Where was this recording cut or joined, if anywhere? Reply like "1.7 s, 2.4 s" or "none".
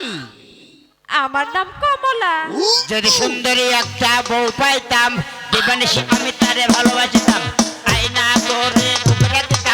none